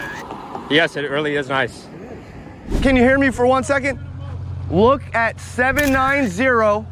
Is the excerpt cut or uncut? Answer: cut